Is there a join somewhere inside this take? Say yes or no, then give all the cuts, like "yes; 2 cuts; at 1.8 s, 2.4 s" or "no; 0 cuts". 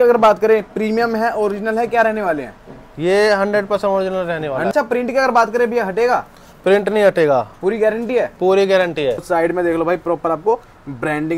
yes; 2 cuts; at 4.7 s, 9.2 s